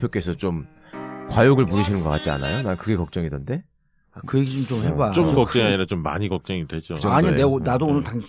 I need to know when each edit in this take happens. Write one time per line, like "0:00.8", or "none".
none